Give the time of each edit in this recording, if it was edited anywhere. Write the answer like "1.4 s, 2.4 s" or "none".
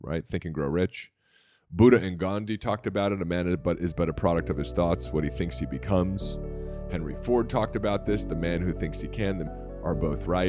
9.5 s